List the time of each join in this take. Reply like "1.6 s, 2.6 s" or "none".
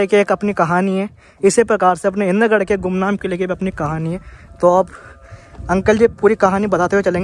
none

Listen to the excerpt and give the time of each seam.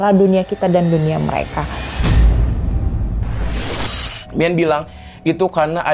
2.0 s, 4.1 s

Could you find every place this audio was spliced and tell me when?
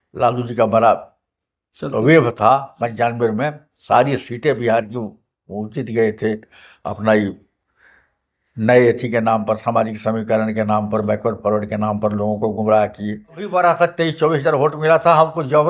13.4 s

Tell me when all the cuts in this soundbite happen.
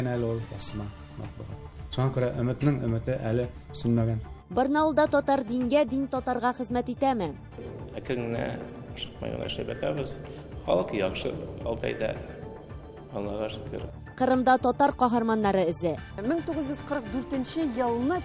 4.3 s

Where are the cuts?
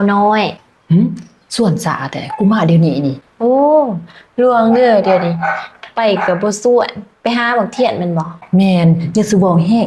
none

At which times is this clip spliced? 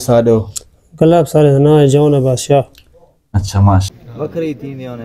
4.0 s

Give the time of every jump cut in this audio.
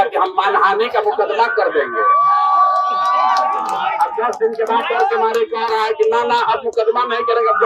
none

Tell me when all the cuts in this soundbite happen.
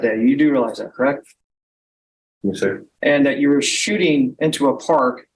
none

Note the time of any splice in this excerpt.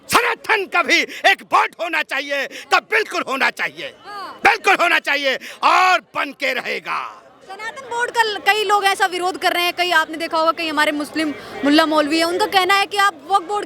none

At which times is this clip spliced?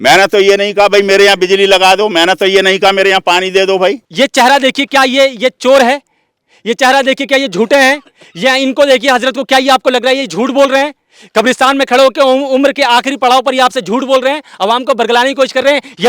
4.0 s

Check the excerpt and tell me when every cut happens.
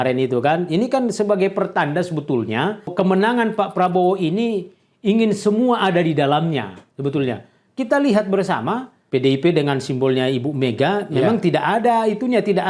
2.9 s, 8.9 s

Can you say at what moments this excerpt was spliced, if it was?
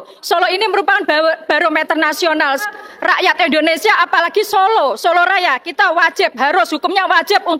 2.7 s

